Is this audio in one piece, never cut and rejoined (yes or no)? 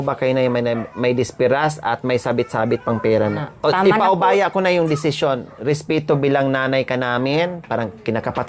no